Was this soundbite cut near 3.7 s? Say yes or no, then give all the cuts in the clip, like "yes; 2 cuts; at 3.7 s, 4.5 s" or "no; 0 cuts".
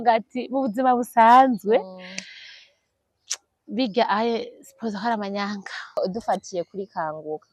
no; 1 cut; at 6.0 s